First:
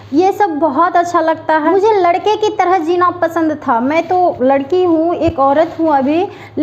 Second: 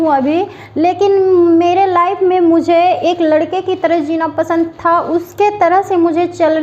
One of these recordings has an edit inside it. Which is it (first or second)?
first